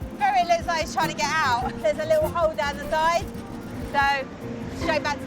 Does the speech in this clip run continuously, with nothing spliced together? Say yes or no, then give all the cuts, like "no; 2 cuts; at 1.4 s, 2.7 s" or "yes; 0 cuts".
no; 1 cut; at 1.8 s